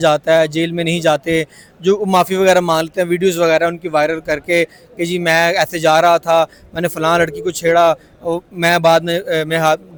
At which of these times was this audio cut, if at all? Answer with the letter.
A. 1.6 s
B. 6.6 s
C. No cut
C